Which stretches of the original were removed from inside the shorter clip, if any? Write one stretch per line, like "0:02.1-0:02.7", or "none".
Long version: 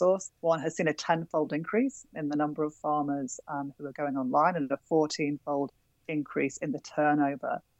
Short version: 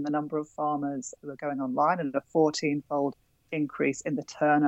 0:03.4-0:03.7